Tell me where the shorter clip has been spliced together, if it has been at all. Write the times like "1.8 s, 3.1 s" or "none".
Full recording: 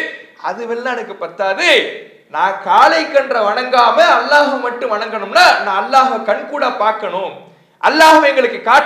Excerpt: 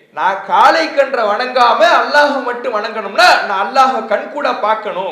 none

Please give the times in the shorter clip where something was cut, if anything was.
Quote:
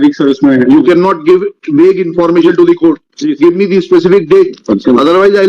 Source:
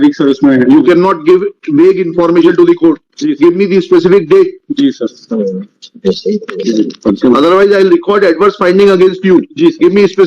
4.6 s

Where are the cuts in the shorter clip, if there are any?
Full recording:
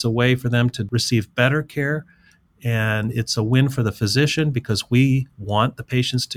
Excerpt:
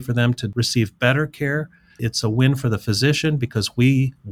2.1 s

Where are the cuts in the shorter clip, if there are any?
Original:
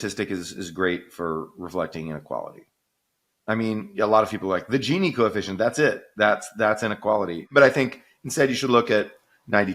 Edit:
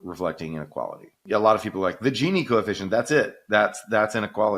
1.2 s

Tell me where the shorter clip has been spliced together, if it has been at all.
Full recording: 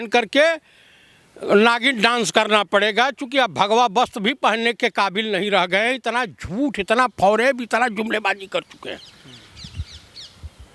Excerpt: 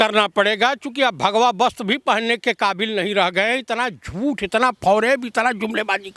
none

